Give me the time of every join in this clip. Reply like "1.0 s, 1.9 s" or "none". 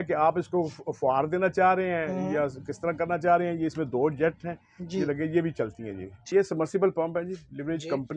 6.1 s